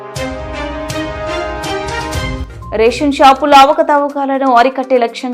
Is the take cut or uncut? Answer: cut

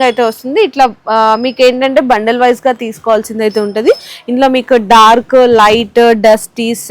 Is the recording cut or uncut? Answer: uncut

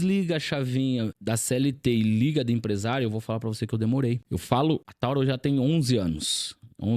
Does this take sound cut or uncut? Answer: cut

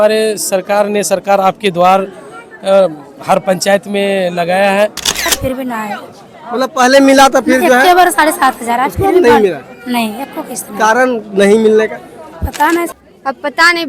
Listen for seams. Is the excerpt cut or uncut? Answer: cut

